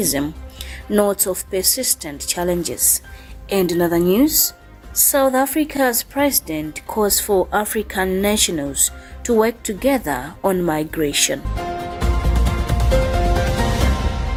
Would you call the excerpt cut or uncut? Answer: uncut